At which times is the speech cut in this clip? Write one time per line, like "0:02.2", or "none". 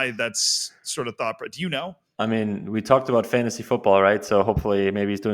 0:02.0